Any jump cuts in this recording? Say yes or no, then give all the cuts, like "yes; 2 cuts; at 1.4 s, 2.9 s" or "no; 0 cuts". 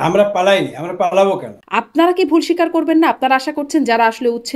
yes; 1 cut; at 1.6 s